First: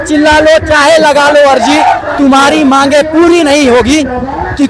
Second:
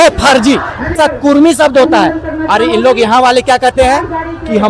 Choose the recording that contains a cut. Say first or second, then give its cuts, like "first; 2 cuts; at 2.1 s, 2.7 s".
second; 1 cut; at 0.9 s